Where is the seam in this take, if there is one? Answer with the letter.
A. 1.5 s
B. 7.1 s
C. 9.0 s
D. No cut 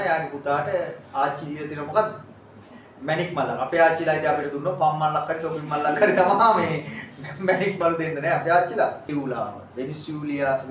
C